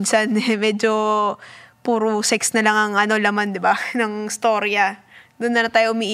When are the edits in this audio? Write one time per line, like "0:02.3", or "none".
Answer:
none